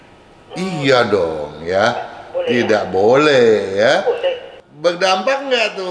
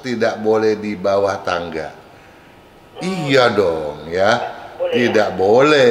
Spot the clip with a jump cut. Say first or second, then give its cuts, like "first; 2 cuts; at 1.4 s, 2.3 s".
first; 1 cut; at 4.5 s